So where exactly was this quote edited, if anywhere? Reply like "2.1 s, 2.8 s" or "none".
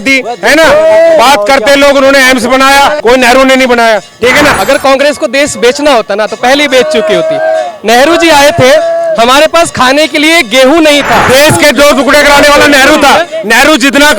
3.0 s, 4.5 s, 11.2 s